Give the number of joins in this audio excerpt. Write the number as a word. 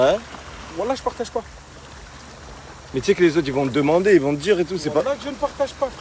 zero